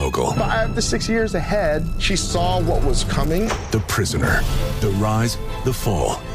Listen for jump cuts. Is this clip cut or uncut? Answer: uncut